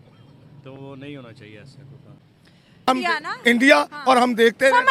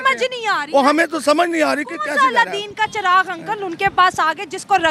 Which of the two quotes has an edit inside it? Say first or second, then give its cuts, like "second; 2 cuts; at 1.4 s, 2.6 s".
first; 1 cut; at 2.9 s